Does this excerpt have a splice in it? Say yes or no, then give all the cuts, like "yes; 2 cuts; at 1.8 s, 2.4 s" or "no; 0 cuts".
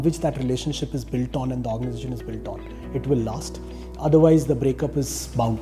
no; 0 cuts